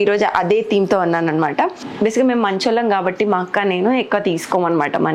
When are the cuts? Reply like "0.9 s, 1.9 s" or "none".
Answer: 1.8 s